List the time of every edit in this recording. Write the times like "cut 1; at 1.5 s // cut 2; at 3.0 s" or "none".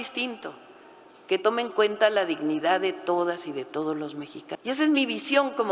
cut 1; at 4.6 s